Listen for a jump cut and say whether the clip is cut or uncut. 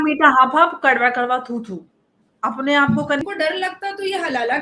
cut